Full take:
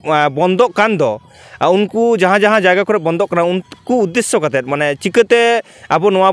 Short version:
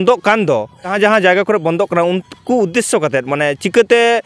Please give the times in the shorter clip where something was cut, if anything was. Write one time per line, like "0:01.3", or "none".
0:00.9

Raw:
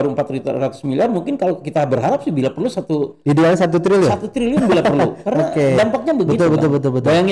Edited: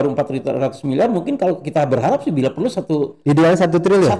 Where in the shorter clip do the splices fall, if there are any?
none

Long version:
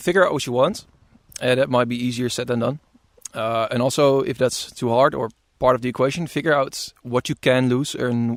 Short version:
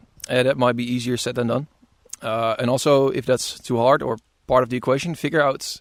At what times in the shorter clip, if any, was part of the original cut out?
none

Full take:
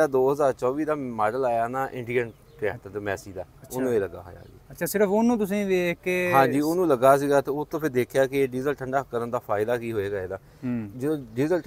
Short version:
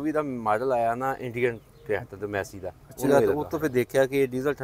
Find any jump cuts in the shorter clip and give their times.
0:03.0

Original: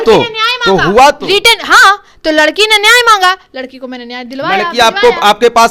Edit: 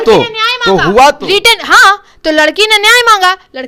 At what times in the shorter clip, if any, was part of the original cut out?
none

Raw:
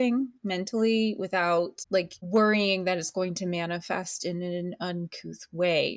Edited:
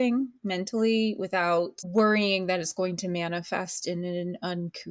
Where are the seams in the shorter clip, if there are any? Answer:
0:01.8

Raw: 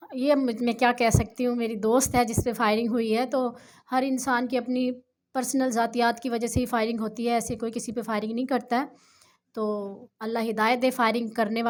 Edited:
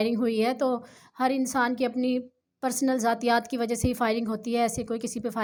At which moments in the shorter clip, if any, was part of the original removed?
none

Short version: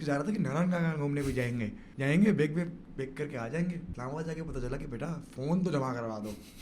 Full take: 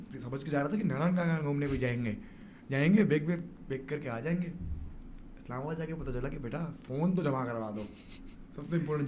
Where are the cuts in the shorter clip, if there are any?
0:01.8
0:03.9

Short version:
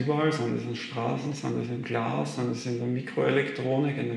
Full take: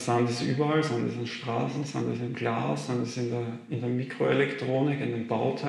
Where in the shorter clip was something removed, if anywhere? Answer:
0:02.8

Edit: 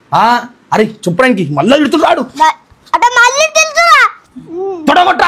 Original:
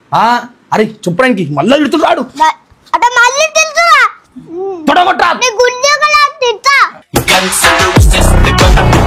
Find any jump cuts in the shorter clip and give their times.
none

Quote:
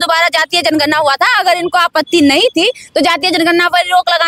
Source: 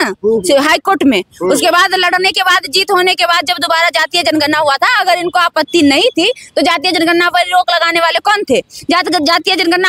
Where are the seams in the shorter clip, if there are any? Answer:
none

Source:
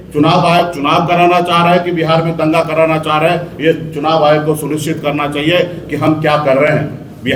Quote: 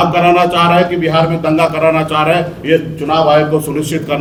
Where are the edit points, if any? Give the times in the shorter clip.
none

